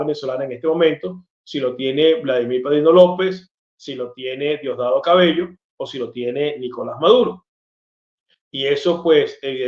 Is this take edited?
no; 0 cuts

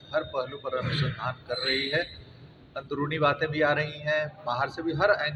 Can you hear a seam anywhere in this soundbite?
no; 0 cuts

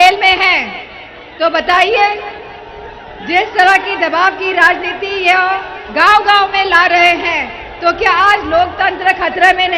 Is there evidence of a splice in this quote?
no; 0 cuts

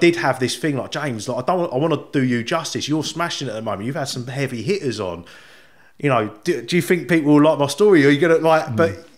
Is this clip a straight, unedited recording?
yes; 0 cuts

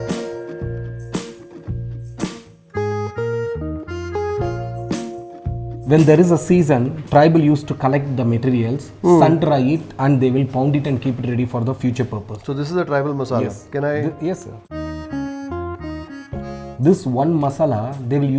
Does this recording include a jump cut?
no; 0 cuts

